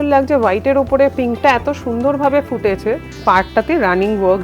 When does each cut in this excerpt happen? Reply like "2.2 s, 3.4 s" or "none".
3.1 s